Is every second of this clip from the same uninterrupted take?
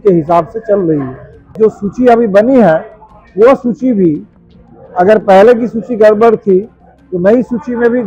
no; 1 cut; at 1.5 s

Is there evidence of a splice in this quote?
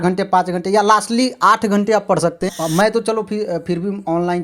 yes; 1 cut; at 2.5 s

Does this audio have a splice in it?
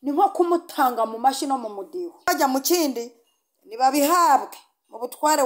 yes; 1 cut; at 2.3 s

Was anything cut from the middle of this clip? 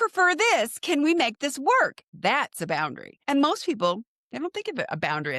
yes; 2 cuts; at 2.0 s, 3.1 s

